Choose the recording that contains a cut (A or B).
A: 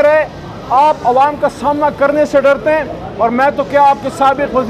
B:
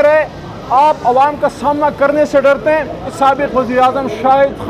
B